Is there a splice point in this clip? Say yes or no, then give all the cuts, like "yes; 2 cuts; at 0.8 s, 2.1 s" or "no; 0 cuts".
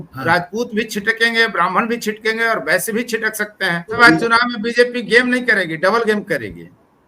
yes; 1 cut; at 4.0 s